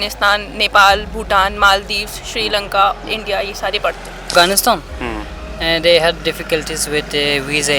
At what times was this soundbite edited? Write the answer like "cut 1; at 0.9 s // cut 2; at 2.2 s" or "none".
cut 1; at 4.2 s